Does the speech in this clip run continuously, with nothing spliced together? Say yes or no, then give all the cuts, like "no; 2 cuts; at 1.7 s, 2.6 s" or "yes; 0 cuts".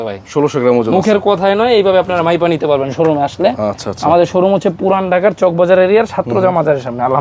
yes; 0 cuts